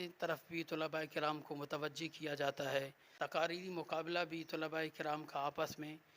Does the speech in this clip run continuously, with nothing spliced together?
no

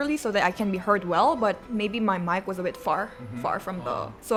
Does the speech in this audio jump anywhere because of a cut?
no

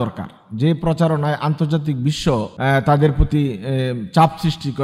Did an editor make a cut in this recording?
yes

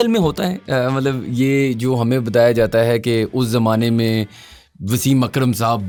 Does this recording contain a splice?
no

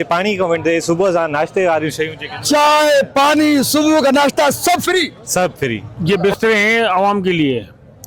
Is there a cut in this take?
yes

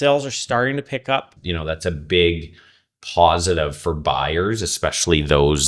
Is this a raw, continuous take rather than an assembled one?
no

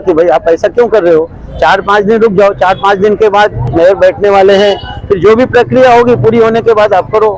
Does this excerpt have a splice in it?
no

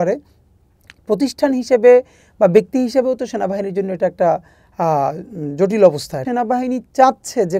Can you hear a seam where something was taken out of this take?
yes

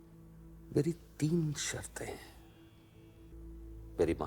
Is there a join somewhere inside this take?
yes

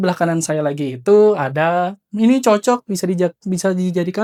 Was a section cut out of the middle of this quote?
no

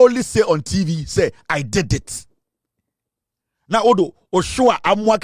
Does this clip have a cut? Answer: no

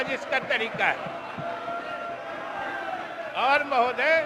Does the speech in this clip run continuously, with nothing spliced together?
yes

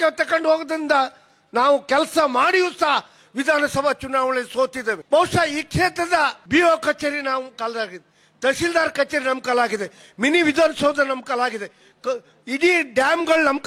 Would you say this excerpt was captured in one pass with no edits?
no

